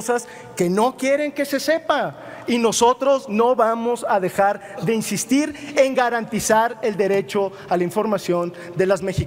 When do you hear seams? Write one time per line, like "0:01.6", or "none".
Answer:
none